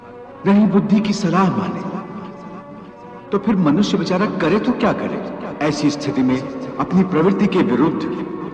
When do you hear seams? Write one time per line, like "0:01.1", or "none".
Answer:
0:05.4